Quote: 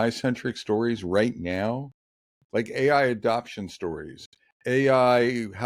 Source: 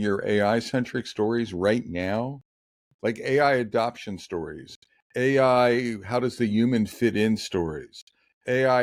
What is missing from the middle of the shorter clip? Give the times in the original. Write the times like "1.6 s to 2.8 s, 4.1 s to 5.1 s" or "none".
none